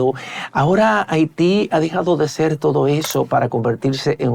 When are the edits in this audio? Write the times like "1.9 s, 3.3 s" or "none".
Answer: none